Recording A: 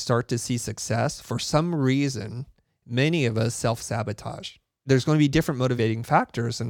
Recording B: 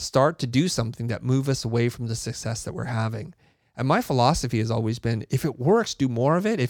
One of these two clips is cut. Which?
A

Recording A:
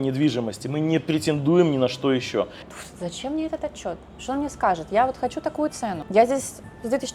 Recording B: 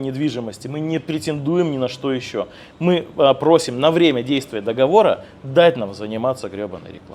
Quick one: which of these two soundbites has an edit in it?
A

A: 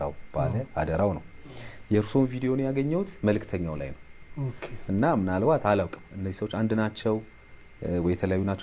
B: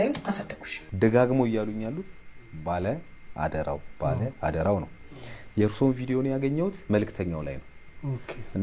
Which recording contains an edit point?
B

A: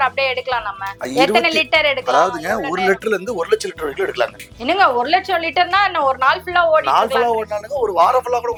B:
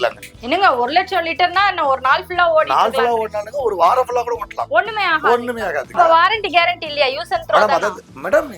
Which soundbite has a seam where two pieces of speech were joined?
B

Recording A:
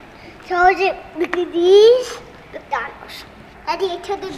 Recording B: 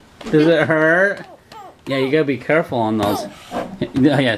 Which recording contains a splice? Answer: A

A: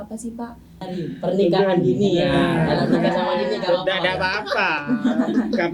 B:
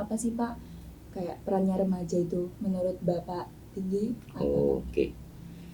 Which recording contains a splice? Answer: A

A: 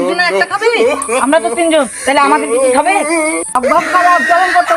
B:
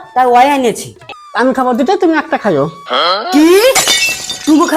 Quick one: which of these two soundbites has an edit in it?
B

